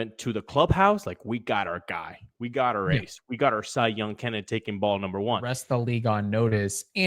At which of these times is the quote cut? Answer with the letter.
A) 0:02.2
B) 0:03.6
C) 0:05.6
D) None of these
C